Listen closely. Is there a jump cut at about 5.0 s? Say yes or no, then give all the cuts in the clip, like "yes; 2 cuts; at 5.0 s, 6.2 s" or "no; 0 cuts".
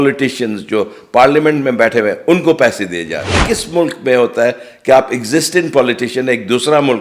no; 1 cut; at 3.3 s